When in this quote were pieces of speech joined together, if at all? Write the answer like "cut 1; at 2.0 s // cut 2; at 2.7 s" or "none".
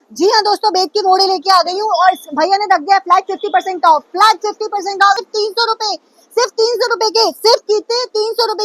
cut 1; at 5.2 s